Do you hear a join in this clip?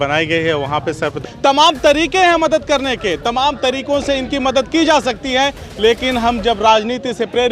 yes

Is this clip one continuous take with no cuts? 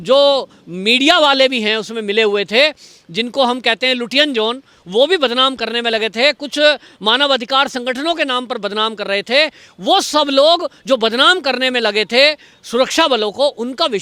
yes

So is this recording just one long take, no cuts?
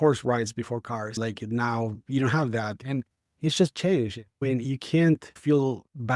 yes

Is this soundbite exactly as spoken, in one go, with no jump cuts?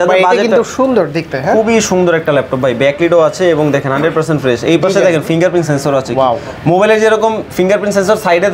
yes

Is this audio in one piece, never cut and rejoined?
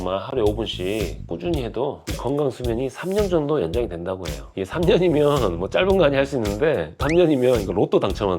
no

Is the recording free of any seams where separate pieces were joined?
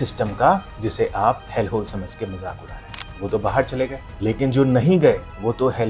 no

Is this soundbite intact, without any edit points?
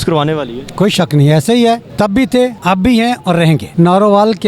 no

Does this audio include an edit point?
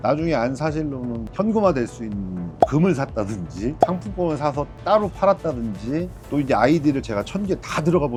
no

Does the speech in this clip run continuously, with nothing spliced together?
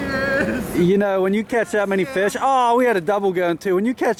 yes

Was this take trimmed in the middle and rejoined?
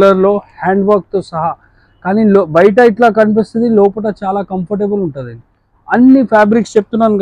no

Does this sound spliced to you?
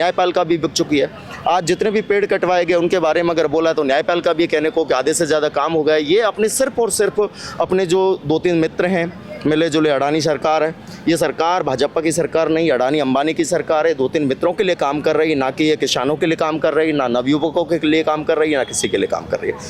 no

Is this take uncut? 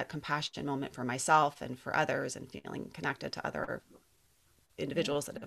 yes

